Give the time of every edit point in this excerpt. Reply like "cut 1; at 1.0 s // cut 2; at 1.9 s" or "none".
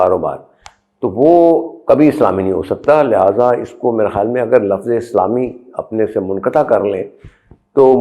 none

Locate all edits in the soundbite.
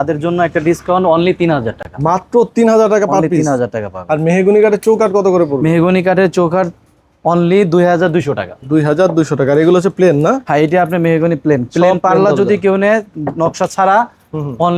none

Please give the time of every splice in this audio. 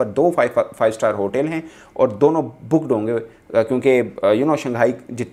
none

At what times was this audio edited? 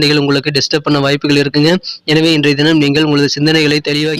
none

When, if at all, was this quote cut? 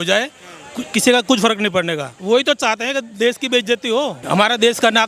cut 1; at 2.1 s // cut 2; at 4.2 s

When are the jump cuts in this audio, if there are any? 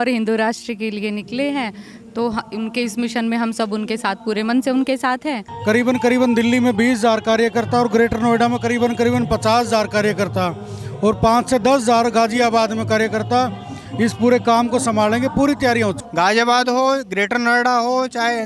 cut 1; at 5.5 s // cut 2; at 16.0 s

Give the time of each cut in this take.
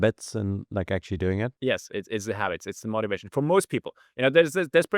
cut 1; at 1.5 s

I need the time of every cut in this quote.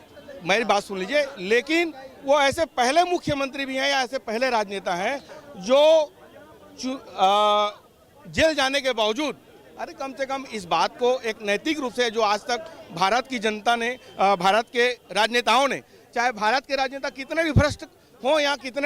none

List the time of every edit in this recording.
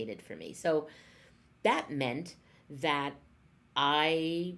none

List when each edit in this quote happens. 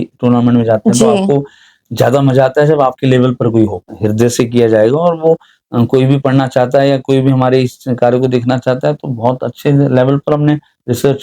cut 1; at 3.9 s

